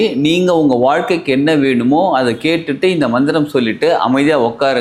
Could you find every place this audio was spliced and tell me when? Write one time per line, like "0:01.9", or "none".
none